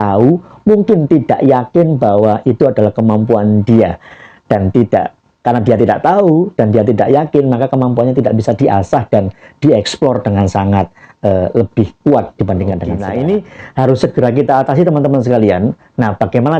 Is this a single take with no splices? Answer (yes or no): no